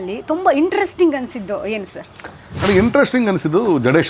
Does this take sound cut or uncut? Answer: uncut